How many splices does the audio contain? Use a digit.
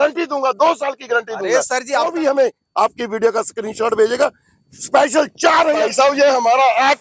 2